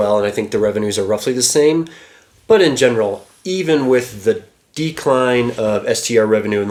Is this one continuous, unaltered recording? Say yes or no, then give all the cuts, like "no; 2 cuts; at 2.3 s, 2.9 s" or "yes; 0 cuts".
yes; 0 cuts